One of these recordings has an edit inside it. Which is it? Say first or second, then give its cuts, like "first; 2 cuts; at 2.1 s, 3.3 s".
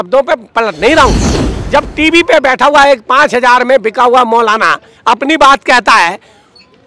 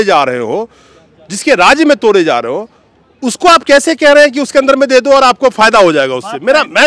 first; 1 cut; at 1.3 s